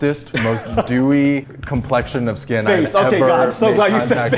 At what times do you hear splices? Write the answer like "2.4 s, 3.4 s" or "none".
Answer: none